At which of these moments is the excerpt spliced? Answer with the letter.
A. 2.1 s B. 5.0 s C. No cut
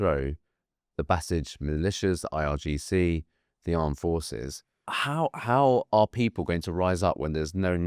B